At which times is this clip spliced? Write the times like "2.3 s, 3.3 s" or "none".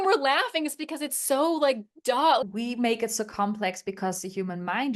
2.4 s